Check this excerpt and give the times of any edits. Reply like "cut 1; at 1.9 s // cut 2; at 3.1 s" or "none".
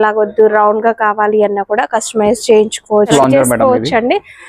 cut 1; at 3.1 s